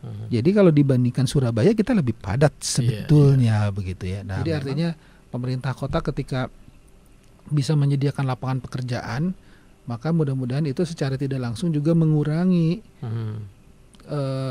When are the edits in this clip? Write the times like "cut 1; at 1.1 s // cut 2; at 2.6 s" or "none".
cut 1; at 4.4 s

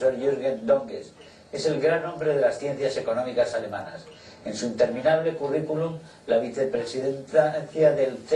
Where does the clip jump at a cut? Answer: cut 1; at 5.8 s

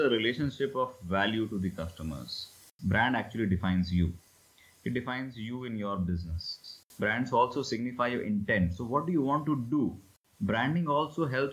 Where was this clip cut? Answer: cut 1; at 2.6 s // cut 2; at 6.6 s // cut 3; at 10.1 s

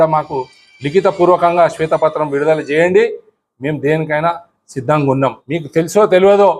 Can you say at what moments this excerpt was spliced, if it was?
cut 1; at 5.5 s

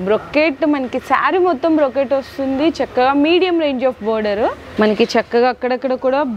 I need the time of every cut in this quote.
cut 1; at 4.6 s

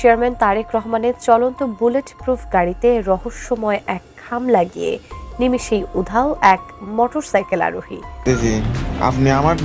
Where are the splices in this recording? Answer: cut 1; at 8.2 s

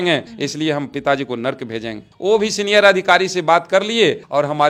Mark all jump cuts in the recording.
none

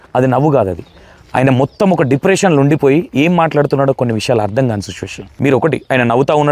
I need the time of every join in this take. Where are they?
cut 1; at 5.2 s

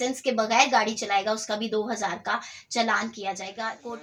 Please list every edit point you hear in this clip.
none

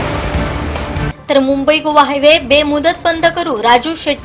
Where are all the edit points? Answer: cut 1; at 1.2 s

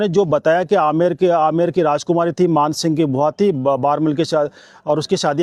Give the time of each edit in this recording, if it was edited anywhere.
none

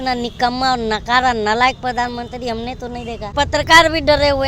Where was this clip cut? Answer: cut 1; at 3.3 s

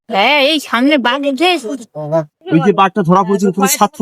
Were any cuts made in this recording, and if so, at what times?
cut 1; at 2.4 s

